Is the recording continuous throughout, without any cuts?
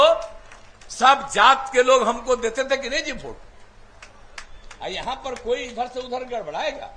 yes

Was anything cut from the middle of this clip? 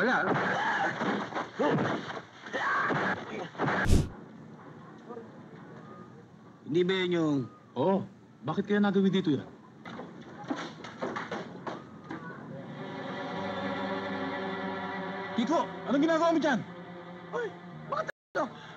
yes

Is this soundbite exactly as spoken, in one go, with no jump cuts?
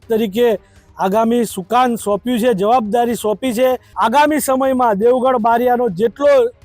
no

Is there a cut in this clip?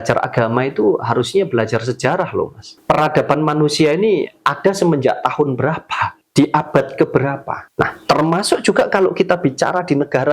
yes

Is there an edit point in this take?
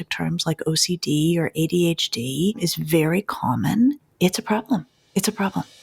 yes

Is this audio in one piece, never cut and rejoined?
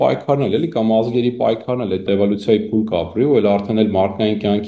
no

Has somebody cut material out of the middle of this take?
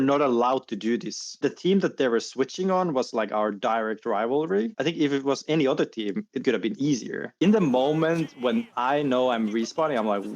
yes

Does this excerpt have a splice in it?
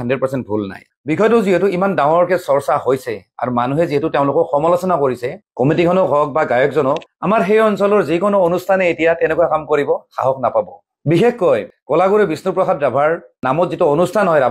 no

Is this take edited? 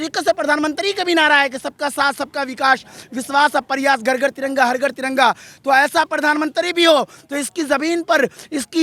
no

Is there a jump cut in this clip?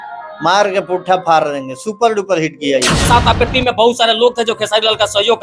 yes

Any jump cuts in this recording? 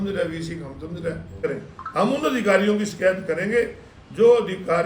yes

